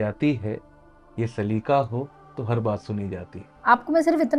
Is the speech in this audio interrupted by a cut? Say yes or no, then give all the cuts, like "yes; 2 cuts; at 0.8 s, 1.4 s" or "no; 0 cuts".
yes; 1 cut; at 3.5 s